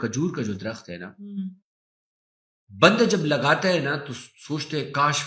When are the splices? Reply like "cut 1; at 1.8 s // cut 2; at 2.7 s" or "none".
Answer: none